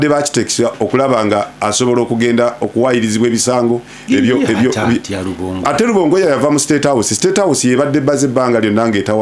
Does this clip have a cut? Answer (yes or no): no